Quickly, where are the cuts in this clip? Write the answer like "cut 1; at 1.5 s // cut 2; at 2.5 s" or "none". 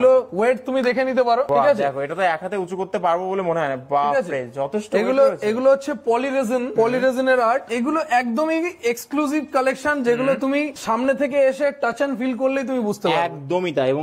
none